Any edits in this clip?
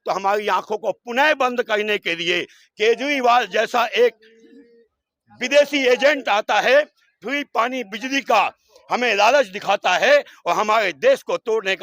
no; 0 cuts

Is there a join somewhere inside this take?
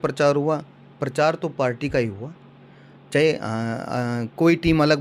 no; 0 cuts

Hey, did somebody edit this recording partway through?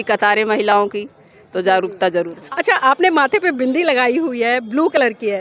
no; 0 cuts

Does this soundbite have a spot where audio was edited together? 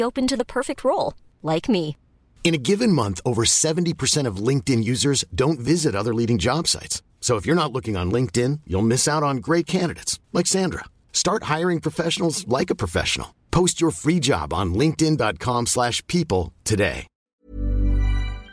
yes; 1 cut; at 17.1 s

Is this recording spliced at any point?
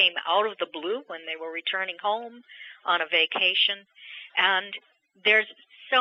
no; 0 cuts

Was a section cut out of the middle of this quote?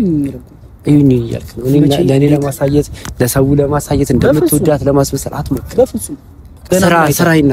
no; 0 cuts

